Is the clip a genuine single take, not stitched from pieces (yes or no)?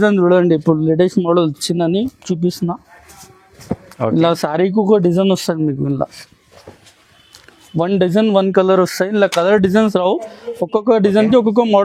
yes